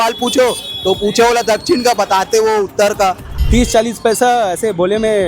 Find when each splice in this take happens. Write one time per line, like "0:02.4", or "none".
0:03.3